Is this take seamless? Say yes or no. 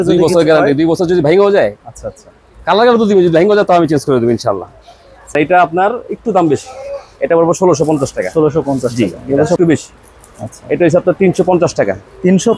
no